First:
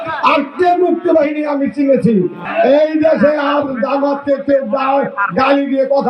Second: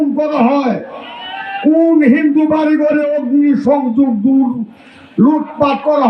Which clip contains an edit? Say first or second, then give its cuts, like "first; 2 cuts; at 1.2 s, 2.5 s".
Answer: first; 1 cut; at 2.4 s